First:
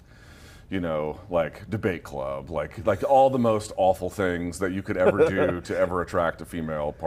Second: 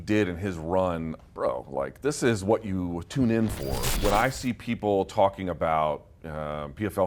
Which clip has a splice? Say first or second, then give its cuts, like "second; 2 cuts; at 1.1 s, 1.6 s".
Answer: second; 2 cuts; at 1.1 s, 3.8 s